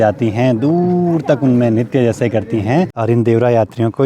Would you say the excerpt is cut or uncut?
cut